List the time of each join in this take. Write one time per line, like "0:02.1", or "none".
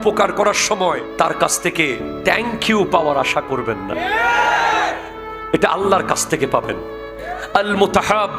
0:01.1
0:07.3